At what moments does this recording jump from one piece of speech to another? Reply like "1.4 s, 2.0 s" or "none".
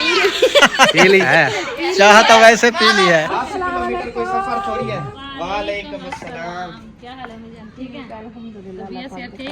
1.3 s, 3.3 s, 5.2 s